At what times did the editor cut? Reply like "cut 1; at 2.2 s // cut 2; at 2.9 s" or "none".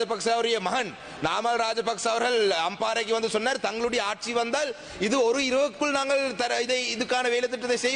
none